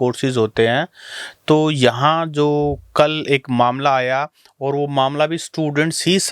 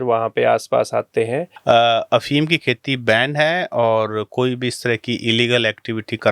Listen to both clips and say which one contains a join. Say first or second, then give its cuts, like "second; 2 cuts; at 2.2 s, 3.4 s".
second; 1 cut; at 1.5 s